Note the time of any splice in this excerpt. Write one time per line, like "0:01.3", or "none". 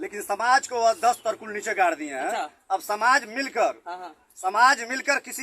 none